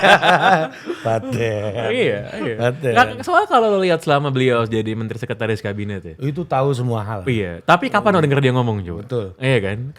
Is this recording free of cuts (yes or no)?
yes